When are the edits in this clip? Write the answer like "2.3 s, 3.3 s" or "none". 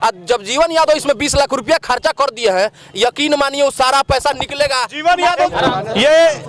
5.5 s